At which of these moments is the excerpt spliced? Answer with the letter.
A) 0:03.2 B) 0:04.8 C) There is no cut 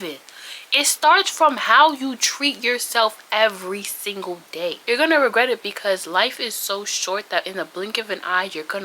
B